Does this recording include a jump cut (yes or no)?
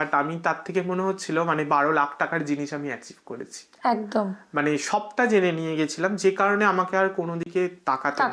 no